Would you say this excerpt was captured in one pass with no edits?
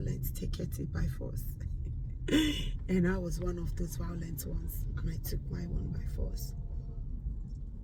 yes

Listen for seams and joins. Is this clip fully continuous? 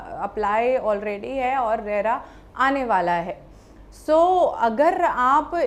yes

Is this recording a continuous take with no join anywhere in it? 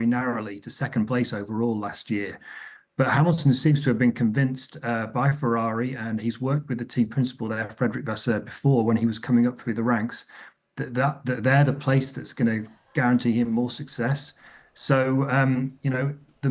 yes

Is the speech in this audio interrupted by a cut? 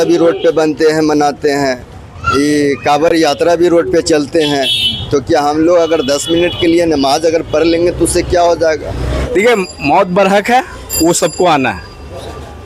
yes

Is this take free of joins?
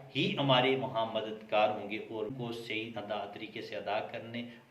no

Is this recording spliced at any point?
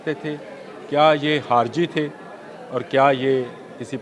no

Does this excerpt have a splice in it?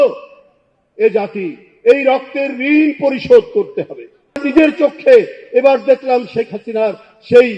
no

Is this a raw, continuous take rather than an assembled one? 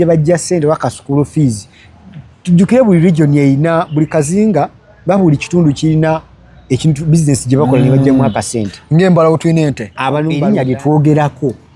no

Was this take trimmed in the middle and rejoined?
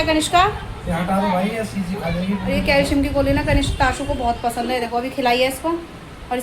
yes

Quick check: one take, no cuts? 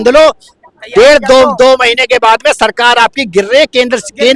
yes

